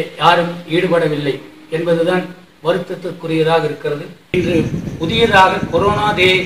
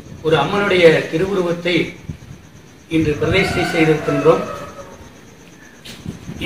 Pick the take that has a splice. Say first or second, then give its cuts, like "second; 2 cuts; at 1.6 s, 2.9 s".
first; 1 cut; at 4.3 s